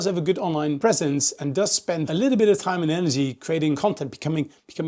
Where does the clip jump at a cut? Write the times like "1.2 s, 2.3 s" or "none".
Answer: 0.8 s, 2.1 s, 3.8 s